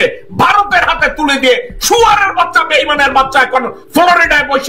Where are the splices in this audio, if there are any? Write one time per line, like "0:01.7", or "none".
none